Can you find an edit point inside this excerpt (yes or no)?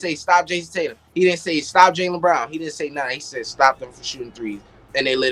no